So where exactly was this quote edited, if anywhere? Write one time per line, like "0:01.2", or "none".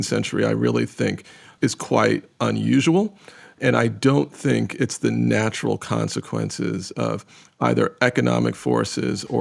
0:01.5
0:03.6